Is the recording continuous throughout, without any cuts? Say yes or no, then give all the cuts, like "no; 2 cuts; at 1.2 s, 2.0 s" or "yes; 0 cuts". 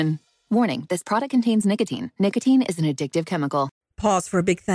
no; 1 cut; at 3.8 s